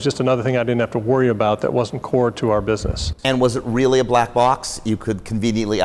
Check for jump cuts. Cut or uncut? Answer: uncut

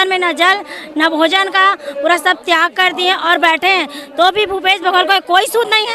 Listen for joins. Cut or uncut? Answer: uncut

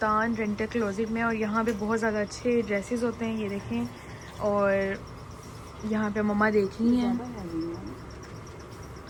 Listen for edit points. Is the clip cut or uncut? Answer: uncut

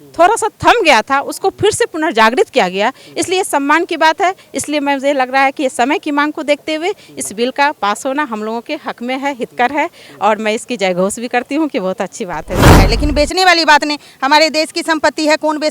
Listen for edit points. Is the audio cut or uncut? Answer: cut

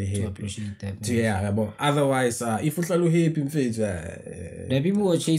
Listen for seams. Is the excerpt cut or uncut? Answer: uncut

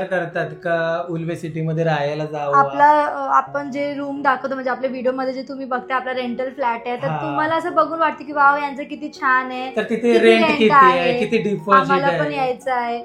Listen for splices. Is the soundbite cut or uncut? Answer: uncut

